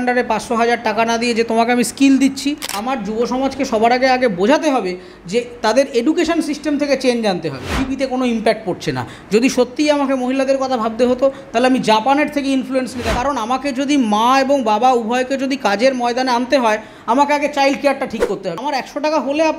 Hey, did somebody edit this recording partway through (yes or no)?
yes